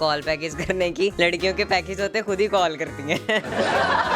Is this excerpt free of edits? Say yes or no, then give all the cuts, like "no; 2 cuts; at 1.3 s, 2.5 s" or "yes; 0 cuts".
no; 1 cut; at 1.1 s